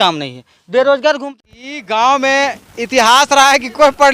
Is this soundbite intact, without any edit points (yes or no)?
no